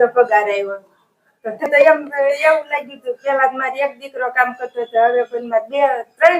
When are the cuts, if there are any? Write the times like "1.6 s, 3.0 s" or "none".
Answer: 1.7 s